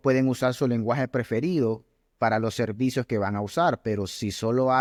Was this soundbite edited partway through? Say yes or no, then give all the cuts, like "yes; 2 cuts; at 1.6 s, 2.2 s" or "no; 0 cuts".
no; 0 cuts